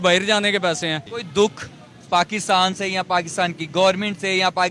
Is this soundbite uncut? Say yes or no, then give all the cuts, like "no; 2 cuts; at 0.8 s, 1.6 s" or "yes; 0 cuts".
no; 1 cut; at 1.1 s